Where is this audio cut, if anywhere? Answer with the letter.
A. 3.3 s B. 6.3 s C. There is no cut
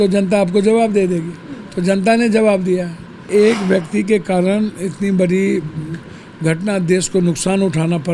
A